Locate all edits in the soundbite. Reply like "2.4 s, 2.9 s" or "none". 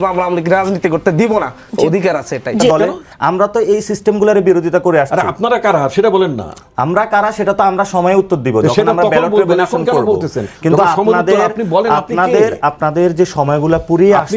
2.7 s